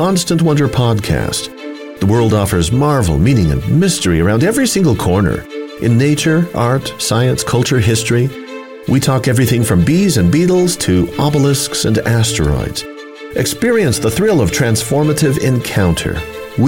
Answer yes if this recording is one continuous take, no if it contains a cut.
yes